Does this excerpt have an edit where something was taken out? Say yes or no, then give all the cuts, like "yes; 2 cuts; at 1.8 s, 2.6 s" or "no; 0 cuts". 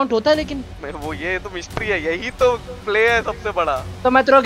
no; 0 cuts